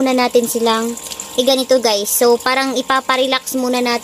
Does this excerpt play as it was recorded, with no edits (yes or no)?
yes